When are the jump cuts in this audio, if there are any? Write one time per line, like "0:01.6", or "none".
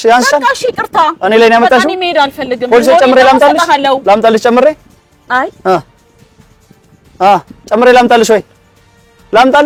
none